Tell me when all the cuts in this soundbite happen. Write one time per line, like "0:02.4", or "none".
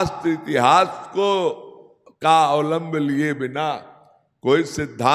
none